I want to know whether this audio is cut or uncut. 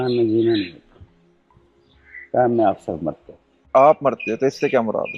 cut